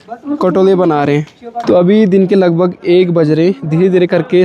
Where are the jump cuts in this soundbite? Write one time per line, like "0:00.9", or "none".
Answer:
0:01.5